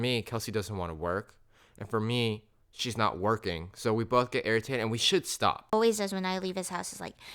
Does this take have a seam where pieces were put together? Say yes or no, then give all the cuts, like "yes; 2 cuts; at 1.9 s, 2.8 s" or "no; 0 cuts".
yes; 1 cut; at 5.7 s